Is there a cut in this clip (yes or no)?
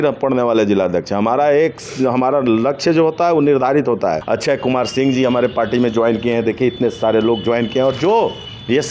yes